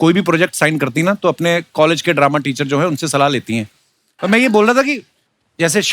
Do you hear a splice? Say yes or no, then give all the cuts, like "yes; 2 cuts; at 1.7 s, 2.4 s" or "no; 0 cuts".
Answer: no; 0 cuts